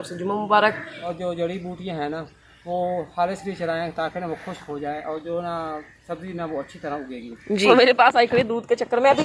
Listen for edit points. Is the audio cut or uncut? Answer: cut